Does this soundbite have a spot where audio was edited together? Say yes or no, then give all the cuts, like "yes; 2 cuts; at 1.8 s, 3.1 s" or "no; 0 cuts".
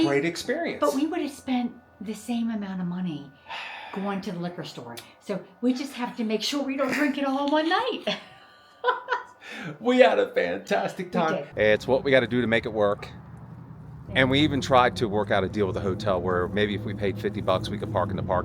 yes; 1 cut; at 11.5 s